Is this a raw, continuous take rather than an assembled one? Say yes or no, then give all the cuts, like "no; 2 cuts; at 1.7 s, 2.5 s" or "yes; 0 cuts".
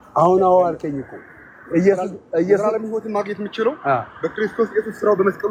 yes; 0 cuts